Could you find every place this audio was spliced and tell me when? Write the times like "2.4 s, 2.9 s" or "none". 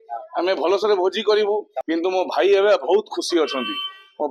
1.7 s